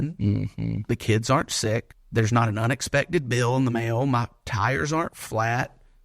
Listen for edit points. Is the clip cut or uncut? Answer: cut